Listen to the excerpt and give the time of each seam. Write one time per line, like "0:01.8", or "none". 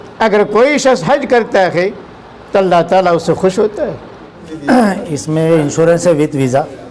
0:04.5

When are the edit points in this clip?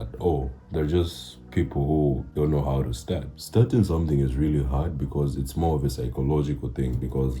0:02.3
0:03.3

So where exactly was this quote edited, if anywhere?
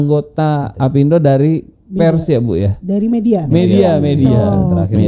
none

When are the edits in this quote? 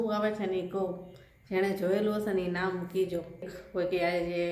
0:03.6

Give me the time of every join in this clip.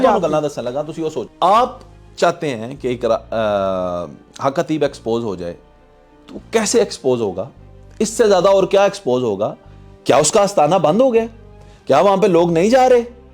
0:01.2

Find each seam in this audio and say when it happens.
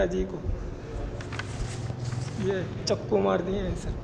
none

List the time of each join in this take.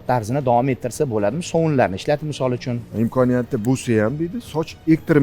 0:02.7

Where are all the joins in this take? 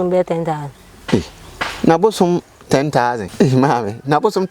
0:03.3

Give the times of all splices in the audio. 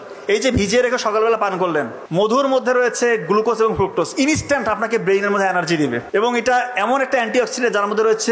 0:02.0
0:06.0

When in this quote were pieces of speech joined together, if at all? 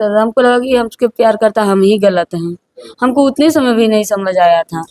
none

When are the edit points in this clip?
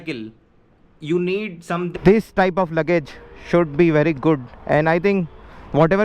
0:01.9

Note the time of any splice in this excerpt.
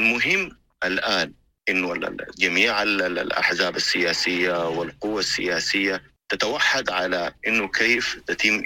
0:01.5
0:06.2

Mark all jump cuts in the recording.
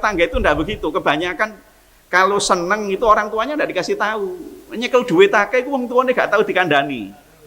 none

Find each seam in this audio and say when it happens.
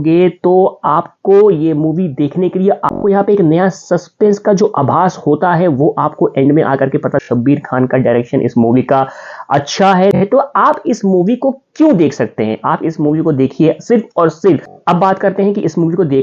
0:02.9
0:07.2
0:10.2
0:14.8

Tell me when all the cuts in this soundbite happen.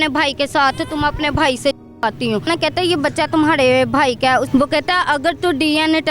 0:02.5
0:04.5

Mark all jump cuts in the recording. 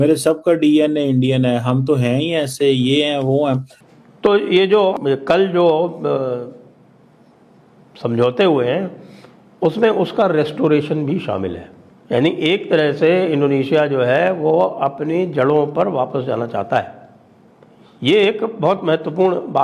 0:03.8
0:04.9

